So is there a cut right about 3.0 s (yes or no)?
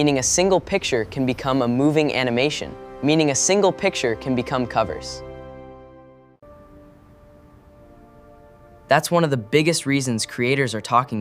no